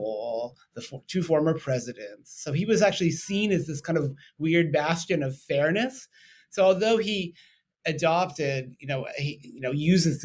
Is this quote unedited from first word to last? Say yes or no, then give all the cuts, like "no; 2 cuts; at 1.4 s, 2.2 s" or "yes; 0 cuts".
yes; 0 cuts